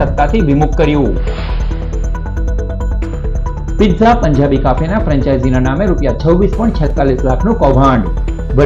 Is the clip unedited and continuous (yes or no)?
yes